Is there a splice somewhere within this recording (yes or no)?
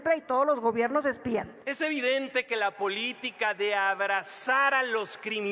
yes